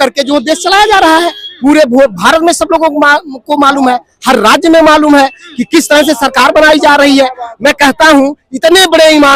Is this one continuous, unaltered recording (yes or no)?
yes